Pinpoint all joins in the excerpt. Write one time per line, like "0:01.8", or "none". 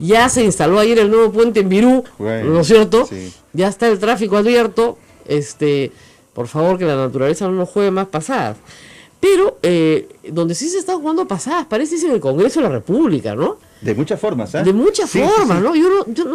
none